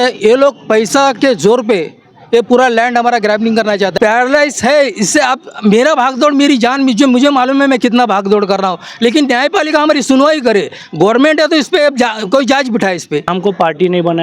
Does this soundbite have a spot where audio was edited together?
yes; 2 cuts; at 3.9 s, 13.3 s

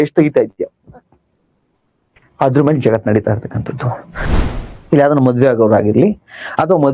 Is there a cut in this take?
yes; 1 cut; at 4.3 s

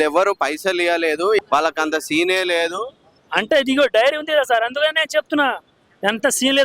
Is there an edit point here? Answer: yes; 1 cut; at 1.4 s

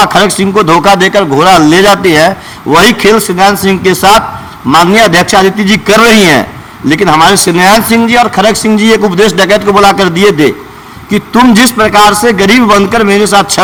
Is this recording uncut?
yes; 0 cuts

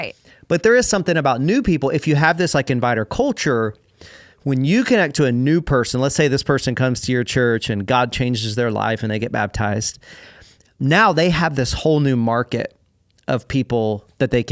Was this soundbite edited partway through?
no; 0 cuts

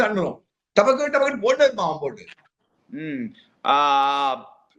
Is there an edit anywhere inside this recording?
no; 0 cuts

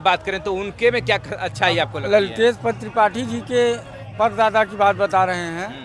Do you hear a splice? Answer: no; 0 cuts

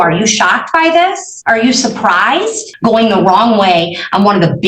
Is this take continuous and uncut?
no; 2 cuts; at 1.3 s, 2.7 s

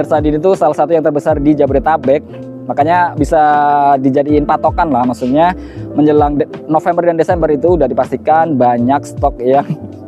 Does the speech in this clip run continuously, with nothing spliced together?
yes; 0 cuts

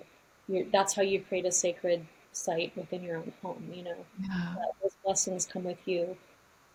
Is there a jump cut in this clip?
no; 0 cuts

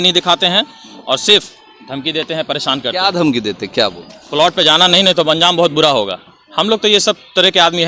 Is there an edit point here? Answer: no; 0 cuts

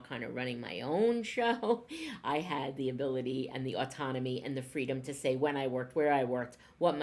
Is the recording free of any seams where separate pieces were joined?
yes; 0 cuts

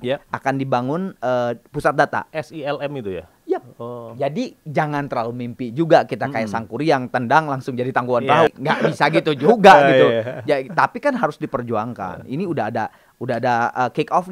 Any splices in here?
yes; 2 cuts; at 2.3 s, 8.5 s

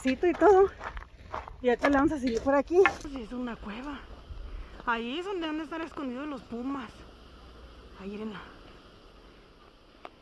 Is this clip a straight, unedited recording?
no; 1 cut; at 3.1 s

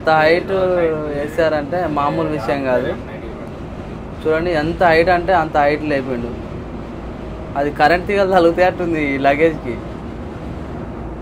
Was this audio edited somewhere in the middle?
no; 0 cuts

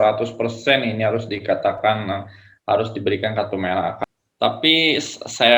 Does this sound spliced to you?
yes; 1 cut; at 4.0 s

